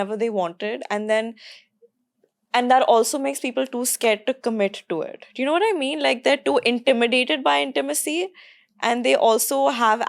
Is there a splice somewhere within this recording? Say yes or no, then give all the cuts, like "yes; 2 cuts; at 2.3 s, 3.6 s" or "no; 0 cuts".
no; 0 cuts